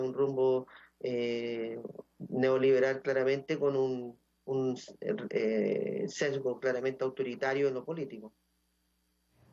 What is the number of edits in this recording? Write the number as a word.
zero